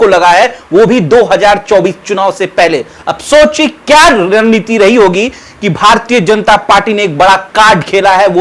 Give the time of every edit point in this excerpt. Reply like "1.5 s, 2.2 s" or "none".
none